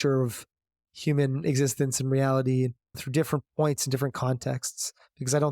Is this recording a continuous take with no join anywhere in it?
no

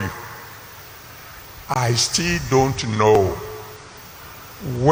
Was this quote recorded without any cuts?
yes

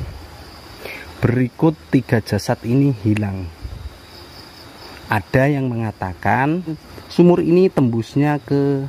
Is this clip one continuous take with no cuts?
no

